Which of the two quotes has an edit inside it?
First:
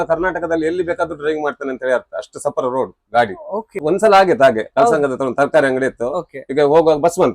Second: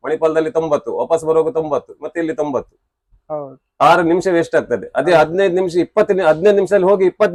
first; 1 cut; at 3.8 s

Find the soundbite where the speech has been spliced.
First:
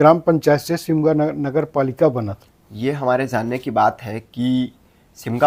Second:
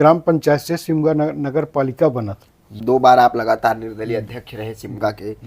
second; 1 cut; at 2.7 s

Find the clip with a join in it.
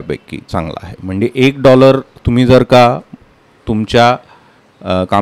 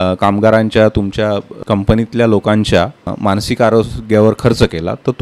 second; 2 cuts; at 1.5 s, 3.1 s

